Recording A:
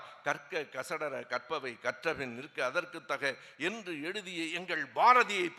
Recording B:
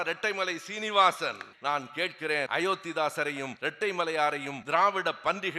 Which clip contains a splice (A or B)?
B